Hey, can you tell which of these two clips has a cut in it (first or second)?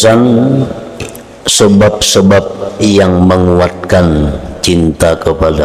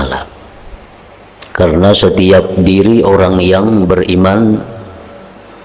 second